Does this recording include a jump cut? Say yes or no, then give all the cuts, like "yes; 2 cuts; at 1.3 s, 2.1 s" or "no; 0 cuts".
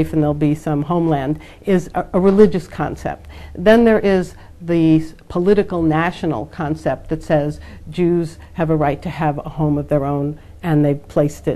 no; 0 cuts